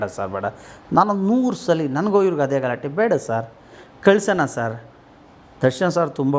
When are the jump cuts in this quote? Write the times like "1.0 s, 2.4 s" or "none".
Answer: none